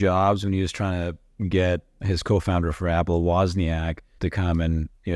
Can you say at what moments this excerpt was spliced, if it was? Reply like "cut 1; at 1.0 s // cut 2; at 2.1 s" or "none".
cut 1; at 1.9 s // cut 2; at 4.0 s